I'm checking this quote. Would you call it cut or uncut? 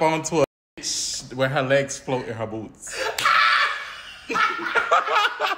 uncut